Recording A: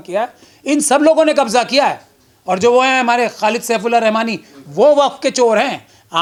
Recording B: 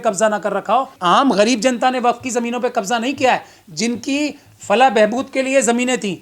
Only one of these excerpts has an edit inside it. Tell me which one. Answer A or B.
B